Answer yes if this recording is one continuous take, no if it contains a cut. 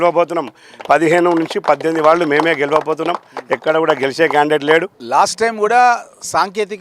no